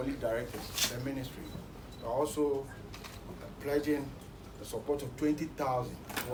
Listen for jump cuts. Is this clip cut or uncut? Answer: uncut